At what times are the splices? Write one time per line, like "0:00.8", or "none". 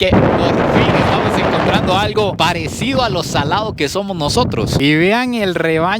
0:04.8